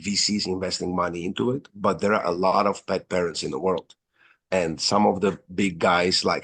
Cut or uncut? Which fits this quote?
uncut